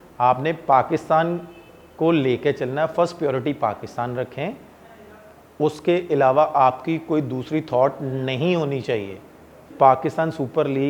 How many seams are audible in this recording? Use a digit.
1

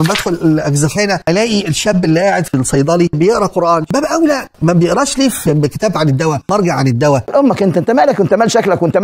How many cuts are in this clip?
0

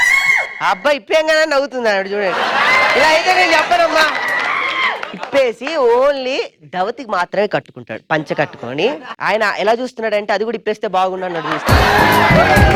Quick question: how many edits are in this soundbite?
0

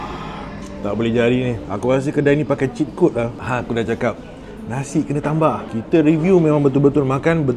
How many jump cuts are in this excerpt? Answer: 2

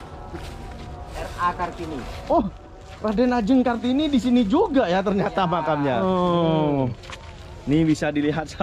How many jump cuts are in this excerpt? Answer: 1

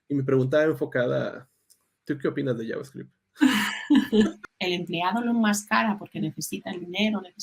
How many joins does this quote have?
1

